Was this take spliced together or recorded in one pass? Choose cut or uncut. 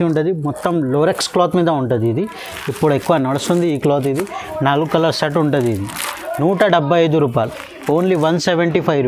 uncut